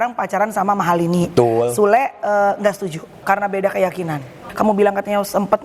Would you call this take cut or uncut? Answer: cut